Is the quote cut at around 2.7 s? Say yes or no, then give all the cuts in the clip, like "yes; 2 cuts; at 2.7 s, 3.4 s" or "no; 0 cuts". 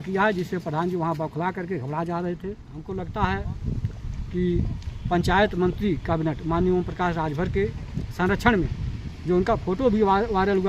yes; 1 cut; at 2.7 s